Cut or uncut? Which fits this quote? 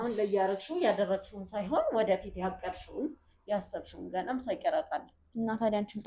uncut